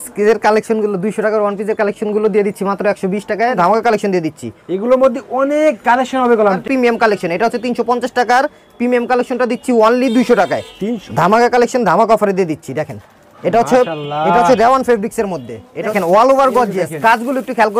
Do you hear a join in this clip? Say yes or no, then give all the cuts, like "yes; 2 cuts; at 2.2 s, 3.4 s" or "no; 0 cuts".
yes; 4 cuts; at 3.6 s, 6.6 s, 11.0 s, 15.9 s